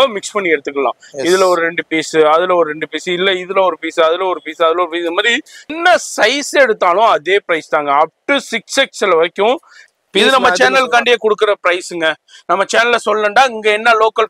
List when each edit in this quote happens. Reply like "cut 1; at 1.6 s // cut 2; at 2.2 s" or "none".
cut 1; at 5.7 s // cut 2; at 9.8 s